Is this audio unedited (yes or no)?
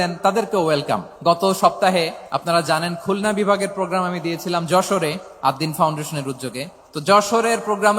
no